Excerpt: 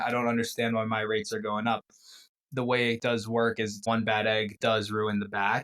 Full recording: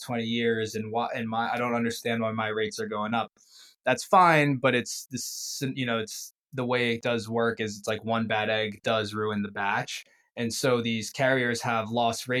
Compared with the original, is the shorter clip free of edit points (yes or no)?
no